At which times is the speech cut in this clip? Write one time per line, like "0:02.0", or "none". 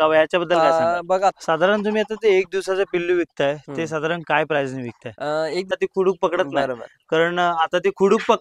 0:01.4
0:05.8